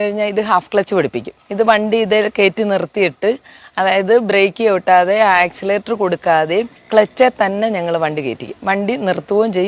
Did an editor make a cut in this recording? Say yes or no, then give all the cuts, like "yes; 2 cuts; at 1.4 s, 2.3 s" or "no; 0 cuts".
no; 0 cuts